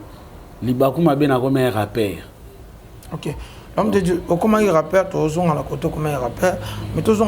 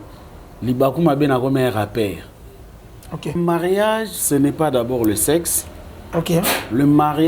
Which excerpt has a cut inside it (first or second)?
second